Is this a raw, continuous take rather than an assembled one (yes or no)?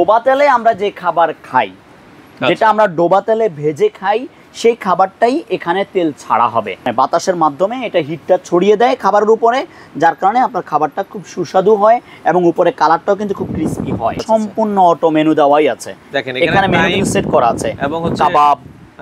no